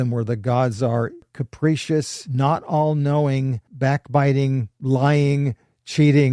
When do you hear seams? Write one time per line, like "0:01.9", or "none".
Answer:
0:01.4
0:02.2
0:03.6
0:04.7